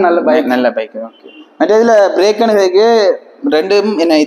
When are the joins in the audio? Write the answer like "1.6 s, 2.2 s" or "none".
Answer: none